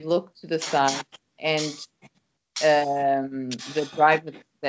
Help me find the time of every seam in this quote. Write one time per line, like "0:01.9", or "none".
none